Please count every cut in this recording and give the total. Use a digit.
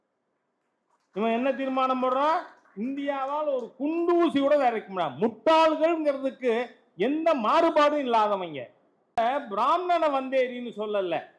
1